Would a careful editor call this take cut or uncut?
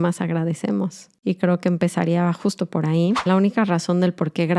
cut